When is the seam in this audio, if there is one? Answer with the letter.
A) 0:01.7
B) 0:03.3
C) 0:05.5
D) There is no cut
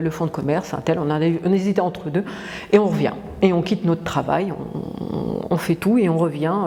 D